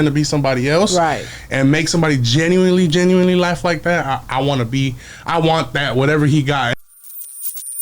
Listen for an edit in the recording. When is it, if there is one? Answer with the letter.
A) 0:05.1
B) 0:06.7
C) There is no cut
B